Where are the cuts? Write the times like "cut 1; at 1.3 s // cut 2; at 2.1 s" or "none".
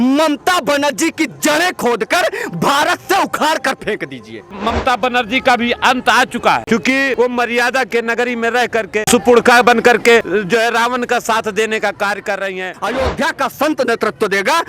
cut 1; at 4.6 s // cut 2; at 7.0 s // cut 3; at 9.0 s // cut 4; at 10.3 s // cut 5; at 12.8 s

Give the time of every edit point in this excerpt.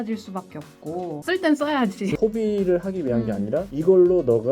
cut 1; at 1.2 s // cut 2; at 2.2 s

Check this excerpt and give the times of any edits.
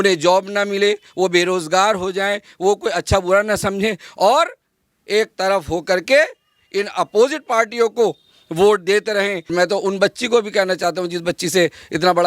cut 1; at 9.5 s

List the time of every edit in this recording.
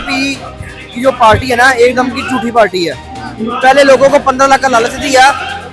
none

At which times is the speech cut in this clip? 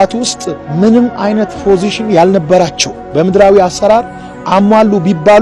none

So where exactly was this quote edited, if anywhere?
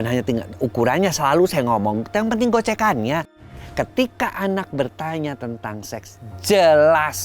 cut 1; at 3.6 s

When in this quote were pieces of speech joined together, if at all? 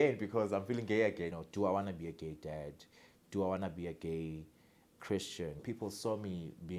cut 1; at 1.4 s // cut 2; at 5.6 s

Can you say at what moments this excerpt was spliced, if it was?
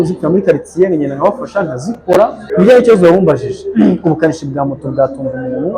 cut 1; at 2.5 s

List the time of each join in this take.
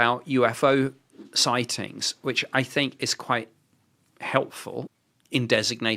cut 1; at 4.9 s

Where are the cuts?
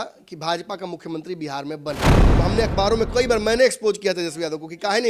cut 1; at 2.2 s

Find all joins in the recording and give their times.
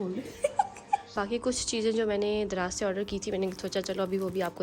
cut 1; at 1.2 s

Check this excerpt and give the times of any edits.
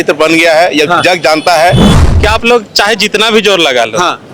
cut 1; at 1.9 s

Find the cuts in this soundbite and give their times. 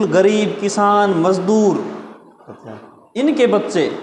none

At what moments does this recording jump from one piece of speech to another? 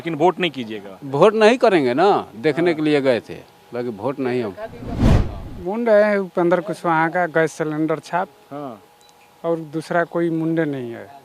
cut 1; at 5.2 s

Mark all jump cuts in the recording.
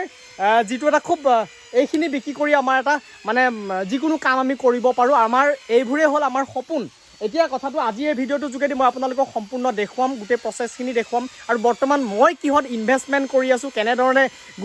none

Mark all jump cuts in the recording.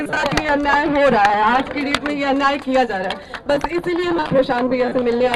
none

